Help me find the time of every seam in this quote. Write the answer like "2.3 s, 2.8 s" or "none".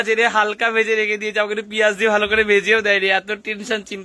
none